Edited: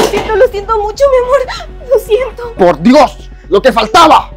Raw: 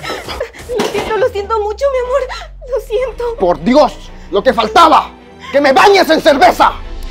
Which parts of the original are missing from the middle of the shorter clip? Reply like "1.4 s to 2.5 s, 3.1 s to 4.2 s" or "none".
none